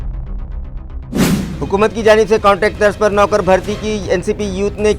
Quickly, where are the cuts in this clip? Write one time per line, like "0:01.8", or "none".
0:01.2